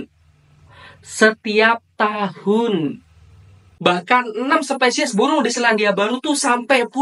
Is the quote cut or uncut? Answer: cut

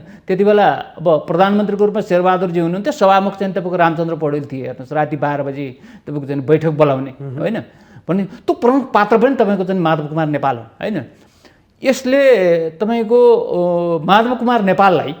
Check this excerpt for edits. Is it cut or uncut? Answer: uncut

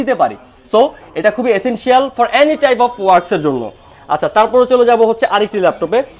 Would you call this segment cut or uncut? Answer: uncut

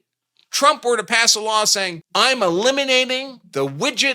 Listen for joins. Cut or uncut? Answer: cut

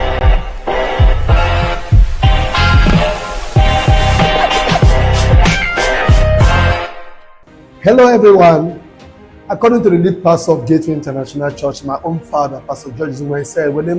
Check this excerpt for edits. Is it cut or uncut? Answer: cut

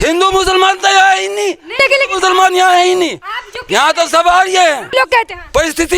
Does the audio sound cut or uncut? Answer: cut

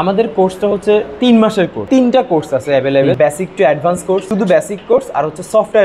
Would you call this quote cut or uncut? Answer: cut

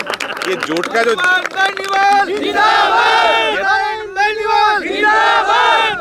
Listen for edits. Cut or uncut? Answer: uncut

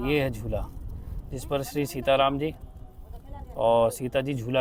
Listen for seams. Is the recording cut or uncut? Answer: uncut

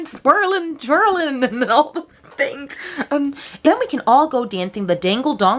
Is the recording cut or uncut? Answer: cut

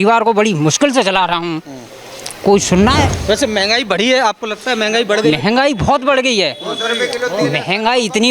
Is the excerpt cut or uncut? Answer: cut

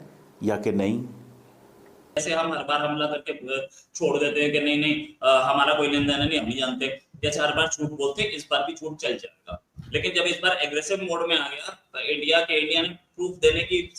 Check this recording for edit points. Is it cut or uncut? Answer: cut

